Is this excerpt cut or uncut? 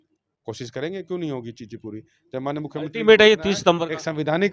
uncut